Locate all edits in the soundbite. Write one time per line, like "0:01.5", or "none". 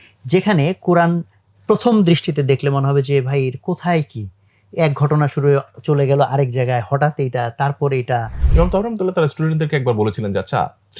0:08.4